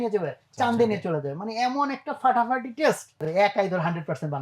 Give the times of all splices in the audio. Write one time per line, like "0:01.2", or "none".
0:03.2